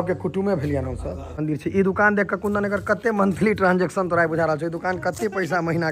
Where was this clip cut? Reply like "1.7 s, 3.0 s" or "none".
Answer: 1.4 s